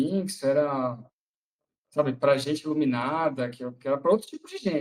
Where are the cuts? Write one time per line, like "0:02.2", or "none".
none